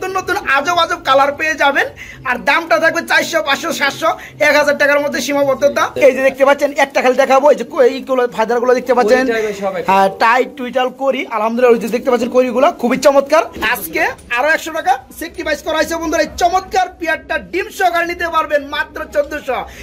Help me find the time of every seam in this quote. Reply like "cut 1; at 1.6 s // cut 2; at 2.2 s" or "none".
cut 1; at 5.9 s // cut 2; at 13.6 s